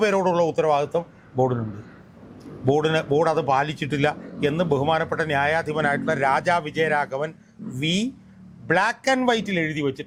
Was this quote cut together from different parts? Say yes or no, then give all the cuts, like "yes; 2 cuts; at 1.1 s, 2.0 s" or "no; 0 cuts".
no; 0 cuts